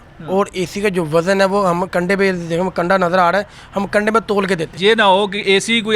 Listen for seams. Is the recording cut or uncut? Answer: cut